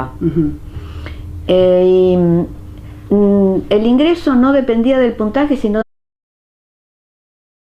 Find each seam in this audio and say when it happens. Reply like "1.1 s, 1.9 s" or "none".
none